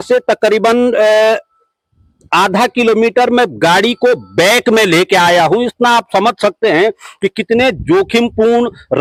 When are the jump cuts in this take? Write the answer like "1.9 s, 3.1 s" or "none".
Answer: none